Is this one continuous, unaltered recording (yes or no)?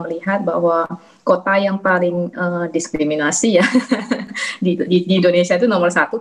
yes